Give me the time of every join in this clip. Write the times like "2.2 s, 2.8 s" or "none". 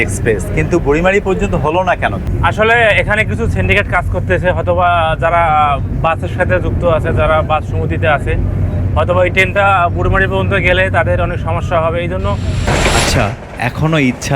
12.7 s